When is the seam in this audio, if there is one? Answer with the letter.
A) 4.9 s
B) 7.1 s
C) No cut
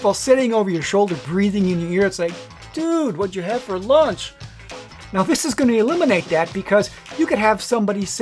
C